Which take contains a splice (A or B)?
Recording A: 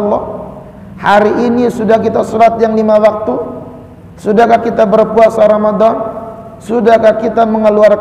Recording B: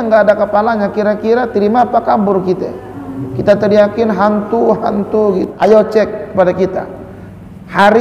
B